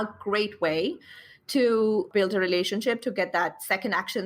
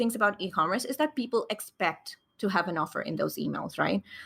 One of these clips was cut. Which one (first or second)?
first